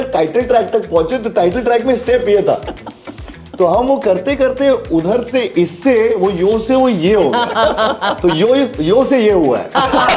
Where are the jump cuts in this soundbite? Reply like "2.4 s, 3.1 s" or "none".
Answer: none